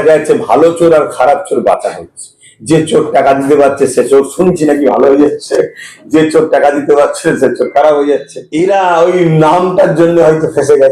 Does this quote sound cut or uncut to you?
cut